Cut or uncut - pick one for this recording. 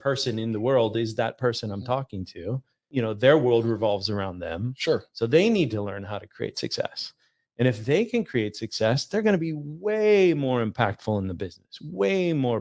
cut